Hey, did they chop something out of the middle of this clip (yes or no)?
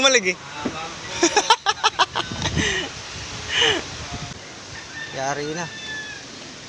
yes